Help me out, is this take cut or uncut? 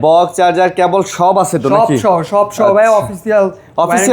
uncut